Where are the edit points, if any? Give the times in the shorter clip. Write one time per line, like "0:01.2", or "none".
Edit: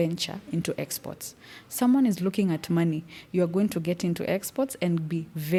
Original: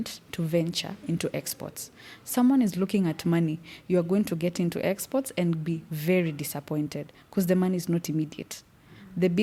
none